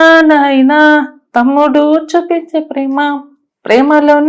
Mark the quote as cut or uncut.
uncut